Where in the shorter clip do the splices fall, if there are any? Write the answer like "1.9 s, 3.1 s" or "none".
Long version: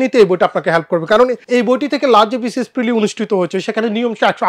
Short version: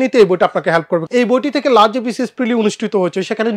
1.0 s